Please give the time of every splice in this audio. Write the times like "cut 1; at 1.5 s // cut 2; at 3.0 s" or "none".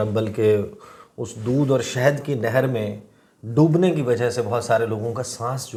none